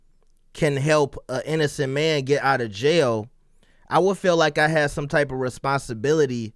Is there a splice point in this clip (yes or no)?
no